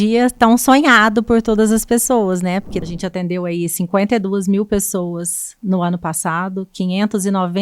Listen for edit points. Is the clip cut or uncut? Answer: cut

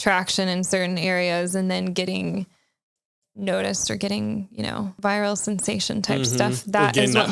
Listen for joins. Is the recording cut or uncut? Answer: cut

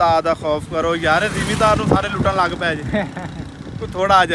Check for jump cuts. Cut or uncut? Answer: uncut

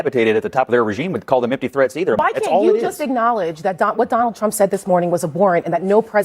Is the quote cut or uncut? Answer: cut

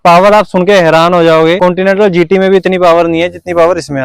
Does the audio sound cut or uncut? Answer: cut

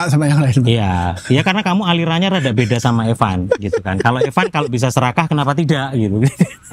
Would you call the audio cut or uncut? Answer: uncut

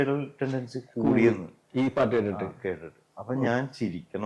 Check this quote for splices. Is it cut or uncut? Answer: uncut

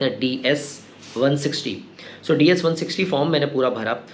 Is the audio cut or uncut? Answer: uncut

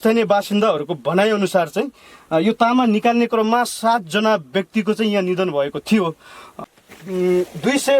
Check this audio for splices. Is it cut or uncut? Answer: cut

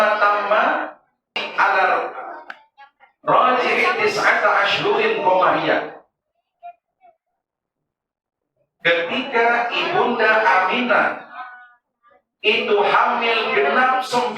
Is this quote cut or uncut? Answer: cut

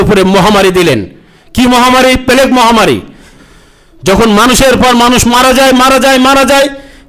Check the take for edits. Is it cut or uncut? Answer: cut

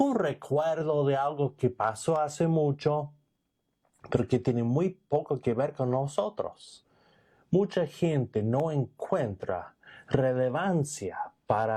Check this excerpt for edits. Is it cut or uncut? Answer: uncut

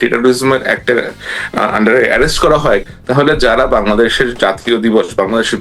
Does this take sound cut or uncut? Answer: cut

